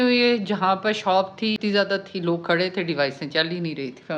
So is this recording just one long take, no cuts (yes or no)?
no